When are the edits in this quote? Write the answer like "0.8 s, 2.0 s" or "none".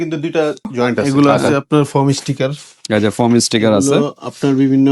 1.1 s